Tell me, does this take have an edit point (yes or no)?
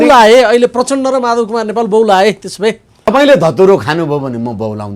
yes